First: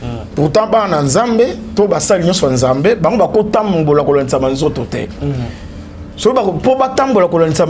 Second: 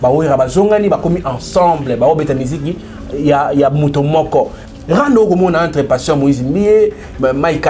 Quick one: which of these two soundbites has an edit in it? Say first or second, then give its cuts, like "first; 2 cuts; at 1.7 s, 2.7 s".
second; 1 cut; at 4.6 s